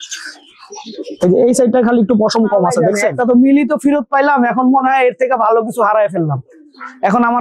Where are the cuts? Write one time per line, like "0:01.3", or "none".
0:02.9